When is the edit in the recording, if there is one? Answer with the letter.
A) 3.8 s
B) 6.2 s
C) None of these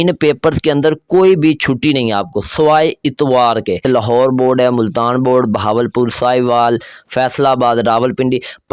A